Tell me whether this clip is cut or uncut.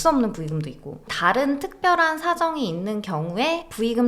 cut